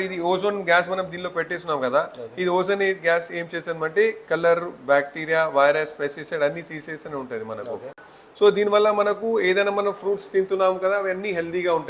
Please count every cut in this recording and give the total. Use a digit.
0